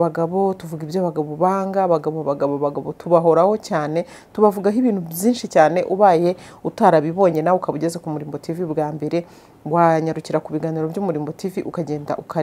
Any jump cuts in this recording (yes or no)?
no